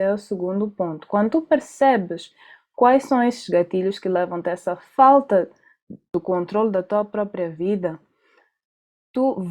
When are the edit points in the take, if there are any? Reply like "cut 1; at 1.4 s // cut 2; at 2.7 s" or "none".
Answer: cut 1; at 6.2 s

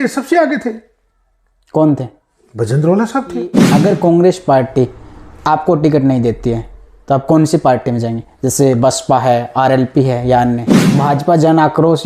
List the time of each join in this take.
cut 1; at 3.6 s // cut 2; at 10.8 s

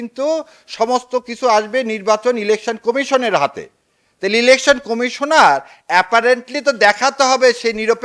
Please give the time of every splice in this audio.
none

